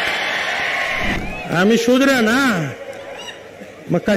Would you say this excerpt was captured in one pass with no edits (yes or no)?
no